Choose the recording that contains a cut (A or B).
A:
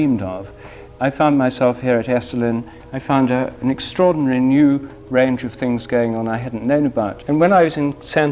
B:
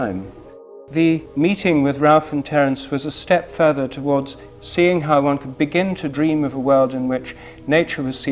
B